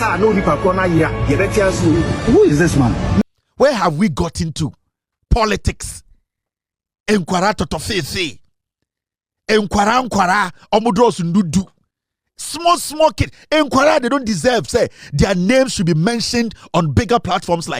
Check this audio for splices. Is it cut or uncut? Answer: cut